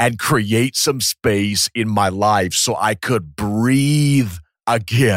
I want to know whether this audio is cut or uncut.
uncut